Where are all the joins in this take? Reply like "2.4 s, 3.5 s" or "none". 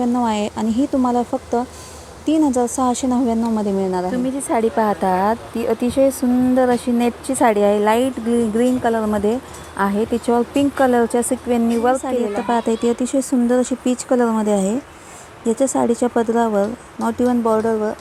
4.1 s, 12.3 s

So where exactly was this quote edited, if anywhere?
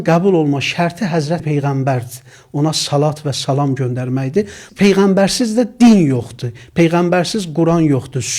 1.4 s, 4.7 s

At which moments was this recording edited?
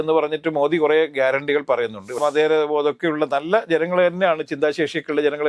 2.2 s

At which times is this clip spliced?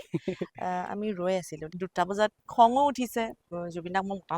1.7 s, 3.4 s

